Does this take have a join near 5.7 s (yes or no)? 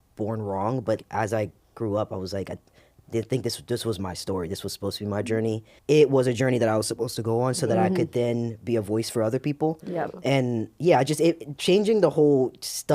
yes